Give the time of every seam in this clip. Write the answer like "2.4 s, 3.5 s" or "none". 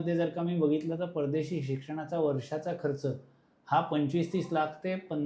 none